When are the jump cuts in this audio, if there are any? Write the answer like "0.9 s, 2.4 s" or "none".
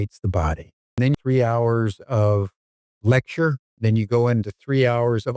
1.2 s, 3.7 s